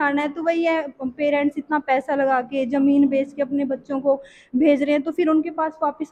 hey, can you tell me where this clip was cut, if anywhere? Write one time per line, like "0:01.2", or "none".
none